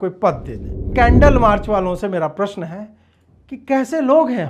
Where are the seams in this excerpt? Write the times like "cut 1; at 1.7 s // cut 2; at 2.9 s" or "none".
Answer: cut 1; at 0.9 s

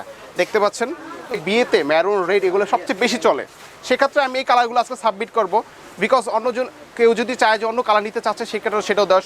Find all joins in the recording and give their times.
cut 1; at 1.3 s

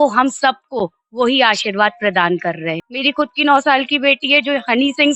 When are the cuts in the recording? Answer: cut 1; at 2.9 s

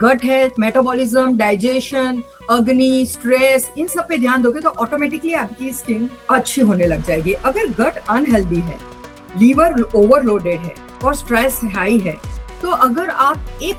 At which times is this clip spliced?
none

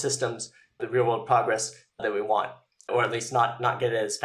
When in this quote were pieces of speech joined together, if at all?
cut 1; at 0.8 s // cut 2; at 2.0 s // cut 3; at 2.9 s

